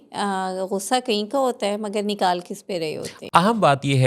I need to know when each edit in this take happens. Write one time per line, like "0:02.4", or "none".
0:03.1